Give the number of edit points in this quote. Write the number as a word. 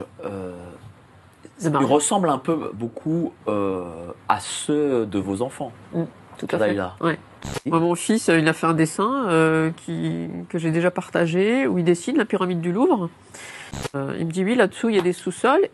two